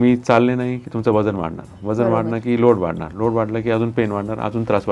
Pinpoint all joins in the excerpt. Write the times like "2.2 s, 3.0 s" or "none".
none